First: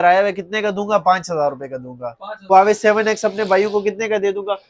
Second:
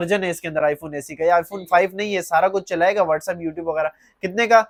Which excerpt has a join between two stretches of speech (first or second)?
first